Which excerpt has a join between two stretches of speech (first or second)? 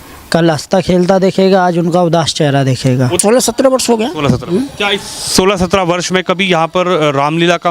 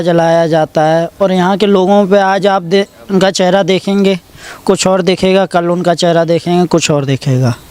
first